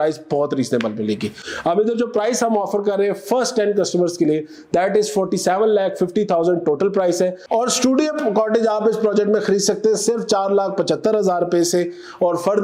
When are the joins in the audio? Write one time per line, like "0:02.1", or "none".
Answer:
none